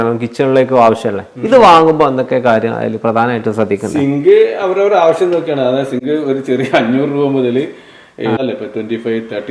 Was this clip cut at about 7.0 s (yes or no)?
no